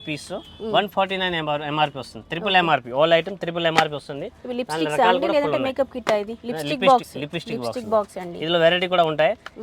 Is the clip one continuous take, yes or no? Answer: yes